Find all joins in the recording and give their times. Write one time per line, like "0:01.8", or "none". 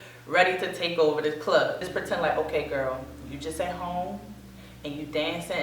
0:01.8